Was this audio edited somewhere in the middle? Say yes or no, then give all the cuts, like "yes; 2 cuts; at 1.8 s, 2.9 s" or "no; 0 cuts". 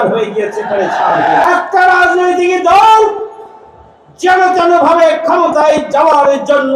yes; 1 cut; at 1.4 s